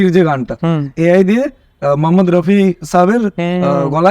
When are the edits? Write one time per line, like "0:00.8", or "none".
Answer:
0:00.9

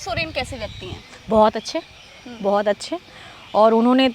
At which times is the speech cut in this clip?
none

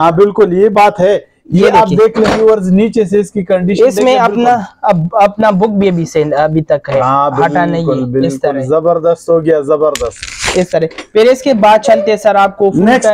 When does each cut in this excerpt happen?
none

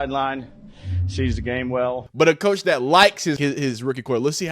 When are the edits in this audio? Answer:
0:02.0
0:03.4

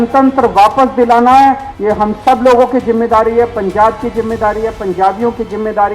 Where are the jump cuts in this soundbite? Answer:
0:01.7

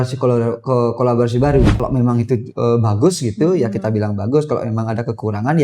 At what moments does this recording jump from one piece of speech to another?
0:01.8

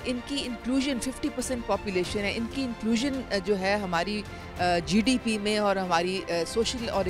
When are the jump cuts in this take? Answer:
none

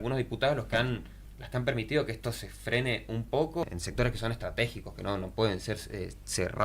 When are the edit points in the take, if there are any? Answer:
0:03.6

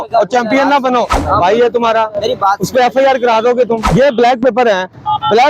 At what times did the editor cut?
0:01.1
0:03.9

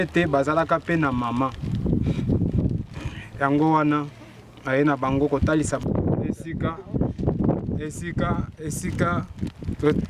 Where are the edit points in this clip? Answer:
0:05.8

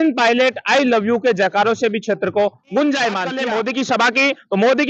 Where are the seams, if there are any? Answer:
0:03.4

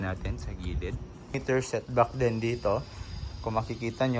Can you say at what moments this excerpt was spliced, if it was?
0:01.3

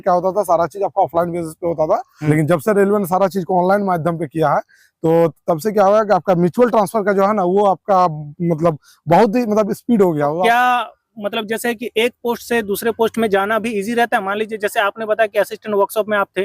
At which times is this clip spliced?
0:02.1
0:10.4

